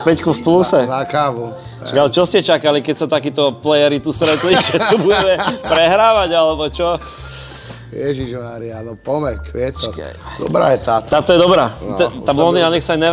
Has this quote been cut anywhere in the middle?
no; 0 cuts

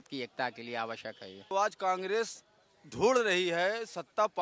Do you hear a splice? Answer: yes; 1 cut; at 1.5 s

